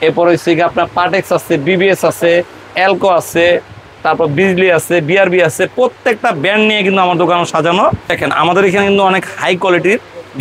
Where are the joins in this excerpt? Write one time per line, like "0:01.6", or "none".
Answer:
0:08.1